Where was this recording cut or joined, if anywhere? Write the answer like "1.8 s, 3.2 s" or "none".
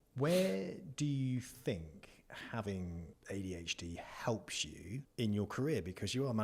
3.1 s, 5.1 s